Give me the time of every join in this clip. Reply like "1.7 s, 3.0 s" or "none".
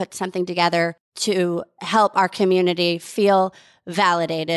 1.1 s